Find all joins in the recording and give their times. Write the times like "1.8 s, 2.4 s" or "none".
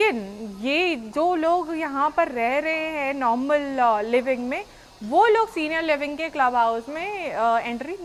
none